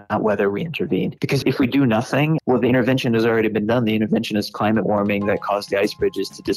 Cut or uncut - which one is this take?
cut